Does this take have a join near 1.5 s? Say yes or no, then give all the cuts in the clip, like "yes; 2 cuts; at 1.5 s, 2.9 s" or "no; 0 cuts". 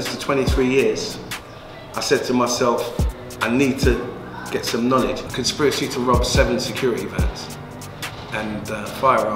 no; 1 cut; at 5.3 s